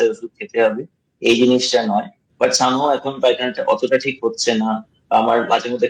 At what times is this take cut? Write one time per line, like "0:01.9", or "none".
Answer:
0:02.2